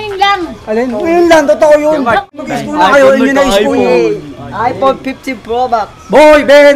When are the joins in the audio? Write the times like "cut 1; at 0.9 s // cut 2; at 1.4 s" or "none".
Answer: cut 1; at 2.2 s